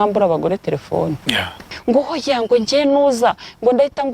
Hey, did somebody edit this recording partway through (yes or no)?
yes